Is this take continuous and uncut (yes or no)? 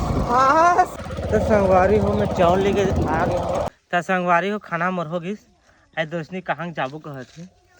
no